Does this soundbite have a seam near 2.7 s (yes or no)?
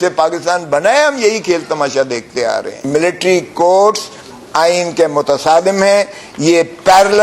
yes